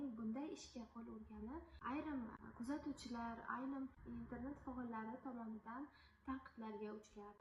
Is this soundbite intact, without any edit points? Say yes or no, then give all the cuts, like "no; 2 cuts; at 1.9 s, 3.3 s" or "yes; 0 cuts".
yes; 0 cuts